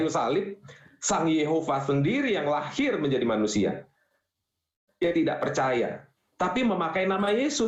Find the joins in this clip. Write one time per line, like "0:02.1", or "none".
none